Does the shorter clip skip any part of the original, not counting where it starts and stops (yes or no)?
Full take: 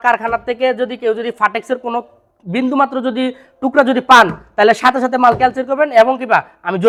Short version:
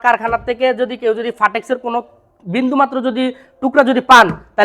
no